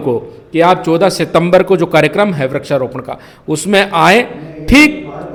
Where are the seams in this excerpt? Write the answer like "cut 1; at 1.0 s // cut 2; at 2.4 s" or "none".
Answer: none